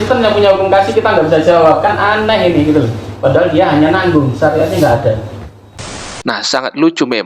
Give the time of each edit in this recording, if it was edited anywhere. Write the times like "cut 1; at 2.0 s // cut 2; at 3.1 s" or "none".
cut 1; at 6.0 s